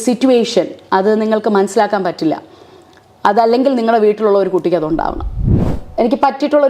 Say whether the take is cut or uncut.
cut